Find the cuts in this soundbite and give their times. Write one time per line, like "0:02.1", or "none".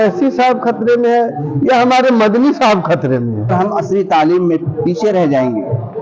0:03.5